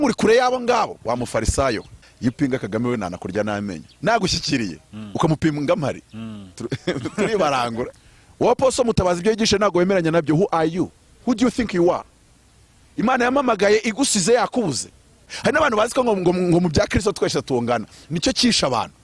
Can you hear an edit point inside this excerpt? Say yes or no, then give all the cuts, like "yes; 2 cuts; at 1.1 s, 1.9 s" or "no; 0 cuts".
yes; 3 cuts; at 2.0 s, 7.9 s, 15.3 s